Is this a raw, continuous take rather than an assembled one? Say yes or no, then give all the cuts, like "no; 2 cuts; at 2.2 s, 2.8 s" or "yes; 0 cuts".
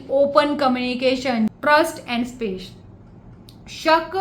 no; 1 cut; at 1.5 s